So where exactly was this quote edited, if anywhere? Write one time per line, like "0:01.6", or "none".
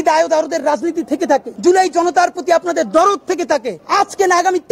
0:01.5
0:03.8

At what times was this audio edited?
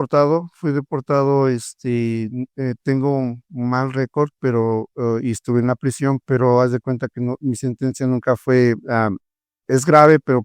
none

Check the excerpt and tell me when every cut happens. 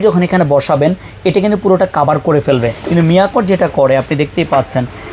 0:02.8

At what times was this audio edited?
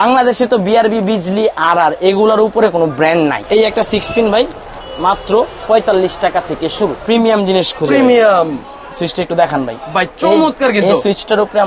0:03.4
0:07.0

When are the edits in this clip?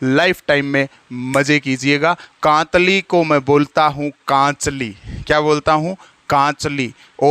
0:02.2

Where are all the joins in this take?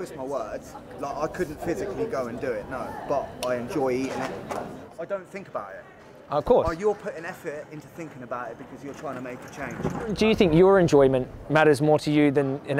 0:04.8
0:10.2

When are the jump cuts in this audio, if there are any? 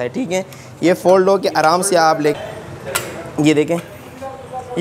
0:02.4

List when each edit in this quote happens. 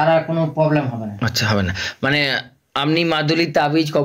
none

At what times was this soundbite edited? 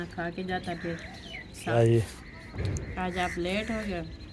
0:01.7

